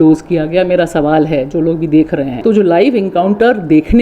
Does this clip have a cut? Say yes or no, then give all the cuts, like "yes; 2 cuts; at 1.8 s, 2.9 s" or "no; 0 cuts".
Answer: yes; 1 cut; at 2.3 s